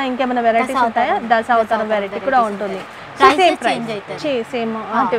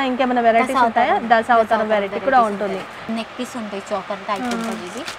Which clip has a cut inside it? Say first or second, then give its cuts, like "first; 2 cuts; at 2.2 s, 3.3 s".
second; 1 cut; at 3.0 s